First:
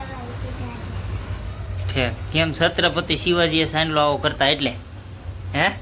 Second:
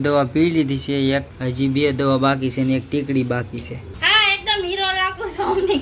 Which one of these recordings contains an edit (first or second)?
second